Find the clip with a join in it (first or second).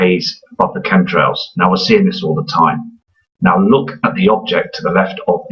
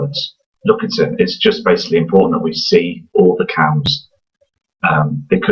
first